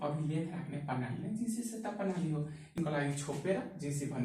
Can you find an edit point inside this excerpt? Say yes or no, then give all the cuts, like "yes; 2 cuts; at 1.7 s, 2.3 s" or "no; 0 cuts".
yes; 1 cut; at 2.8 s